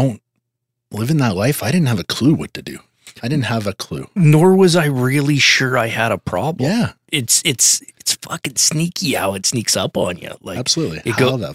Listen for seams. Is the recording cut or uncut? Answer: cut